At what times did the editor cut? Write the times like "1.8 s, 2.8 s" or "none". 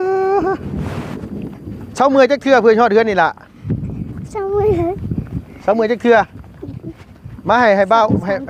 none